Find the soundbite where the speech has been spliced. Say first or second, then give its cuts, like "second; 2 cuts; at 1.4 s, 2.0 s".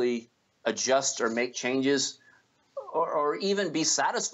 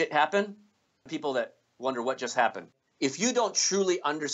second; 2 cuts; at 1.1 s, 2.8 s